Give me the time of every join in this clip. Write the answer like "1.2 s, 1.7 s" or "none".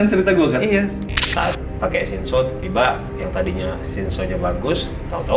1.0 s